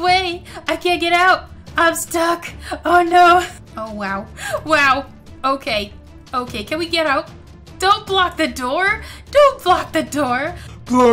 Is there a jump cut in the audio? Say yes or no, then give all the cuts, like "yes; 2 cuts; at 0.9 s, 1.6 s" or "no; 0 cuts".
no; 0 cuts